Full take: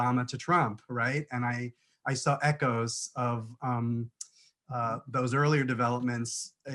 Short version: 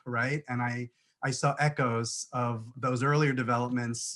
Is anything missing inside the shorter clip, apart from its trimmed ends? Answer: yes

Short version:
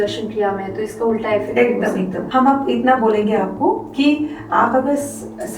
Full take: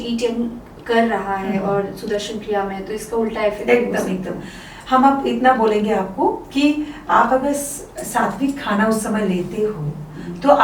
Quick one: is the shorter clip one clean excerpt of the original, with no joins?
no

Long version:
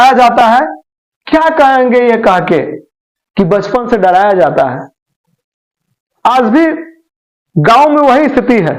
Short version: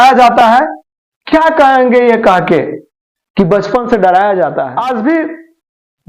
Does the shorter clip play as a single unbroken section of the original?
no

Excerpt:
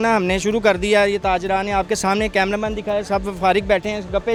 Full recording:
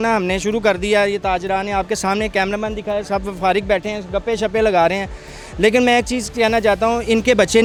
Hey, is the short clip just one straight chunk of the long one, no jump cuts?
yes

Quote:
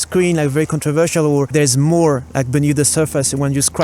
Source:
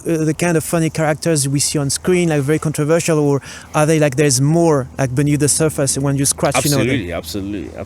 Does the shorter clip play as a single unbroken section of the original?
no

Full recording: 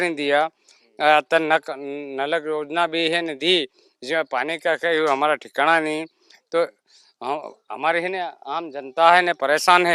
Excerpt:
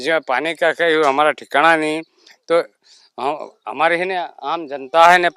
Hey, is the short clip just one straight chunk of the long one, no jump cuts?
yes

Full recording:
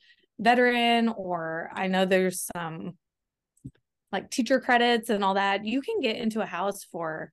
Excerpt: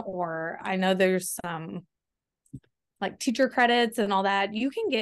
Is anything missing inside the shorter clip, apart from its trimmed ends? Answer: no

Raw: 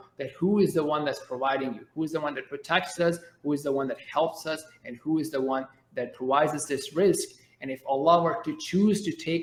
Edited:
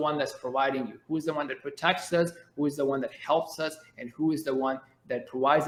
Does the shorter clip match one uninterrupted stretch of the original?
yes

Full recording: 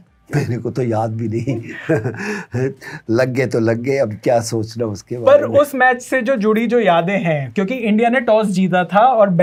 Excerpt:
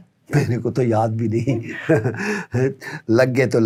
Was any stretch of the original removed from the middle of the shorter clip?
no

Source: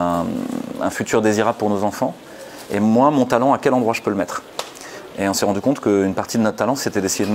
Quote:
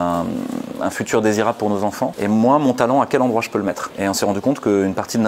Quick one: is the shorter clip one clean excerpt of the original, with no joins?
no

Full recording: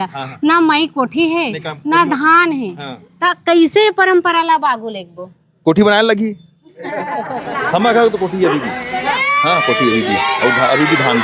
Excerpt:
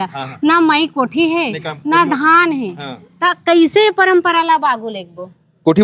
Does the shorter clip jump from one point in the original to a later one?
no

